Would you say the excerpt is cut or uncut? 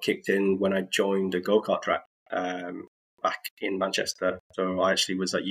uncut